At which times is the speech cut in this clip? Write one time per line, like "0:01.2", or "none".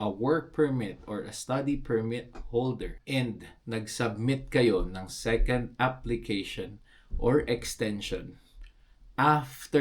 0:02.9